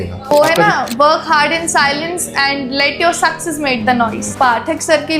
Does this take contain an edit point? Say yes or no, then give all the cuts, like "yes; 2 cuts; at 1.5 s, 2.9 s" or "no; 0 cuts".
yes; 1 cut; at 4.2 s